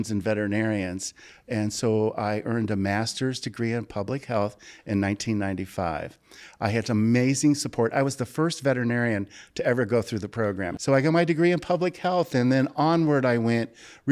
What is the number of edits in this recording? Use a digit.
1